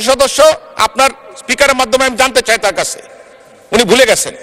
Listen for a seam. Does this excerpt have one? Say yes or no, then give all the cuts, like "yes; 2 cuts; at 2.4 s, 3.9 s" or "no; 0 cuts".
no; 0 cuts